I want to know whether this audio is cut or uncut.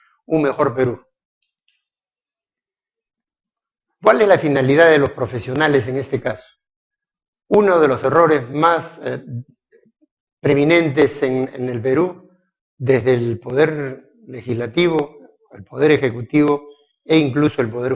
cut